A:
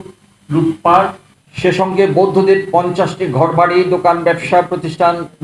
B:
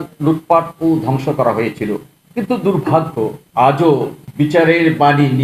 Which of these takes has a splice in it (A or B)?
B